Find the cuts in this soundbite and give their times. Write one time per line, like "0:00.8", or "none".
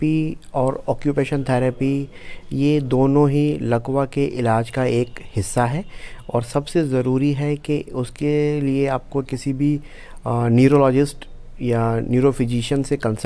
none